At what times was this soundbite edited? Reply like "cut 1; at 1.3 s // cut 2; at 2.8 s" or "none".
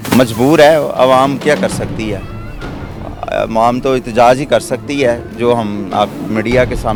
none